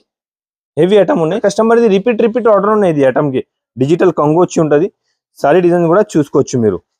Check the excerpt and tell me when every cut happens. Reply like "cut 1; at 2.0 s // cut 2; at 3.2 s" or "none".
cut 1; at 1.4 s

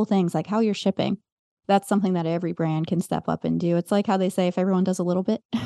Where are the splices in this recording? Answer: none

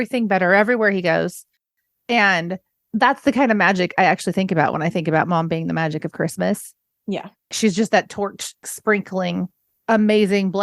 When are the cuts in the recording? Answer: cut 1; at 8.6 s // cut 2; at 9.6 s

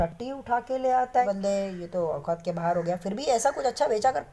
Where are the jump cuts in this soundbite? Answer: cut 1; at 1.3 s

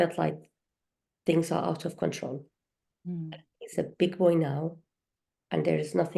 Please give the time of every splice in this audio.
none

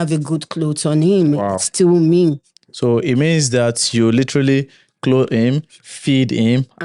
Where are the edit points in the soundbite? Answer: none

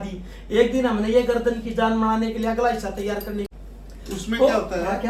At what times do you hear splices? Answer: cut 1; at 3.5 s

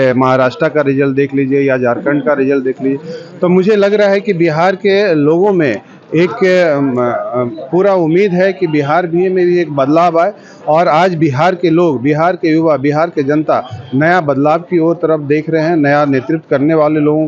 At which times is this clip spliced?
none

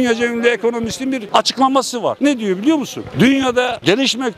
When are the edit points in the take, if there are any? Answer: cut 1; at 1.2 s // cut 2; at 2.2 s

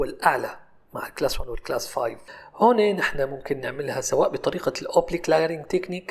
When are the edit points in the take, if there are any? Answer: cut 1; at 2.2 s

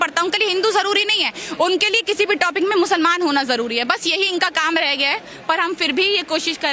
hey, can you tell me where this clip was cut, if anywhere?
none

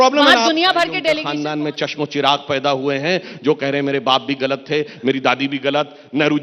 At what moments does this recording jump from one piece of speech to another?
cut 1; at 1.2 s

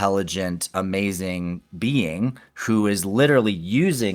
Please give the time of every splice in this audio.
cut 1; at 2.5 s

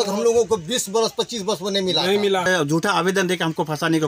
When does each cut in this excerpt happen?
cut 1; at 2.5 s

